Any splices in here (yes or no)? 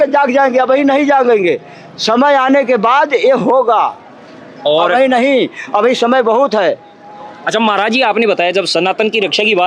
no